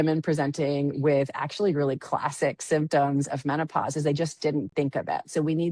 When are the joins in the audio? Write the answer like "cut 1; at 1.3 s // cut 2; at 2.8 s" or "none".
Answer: none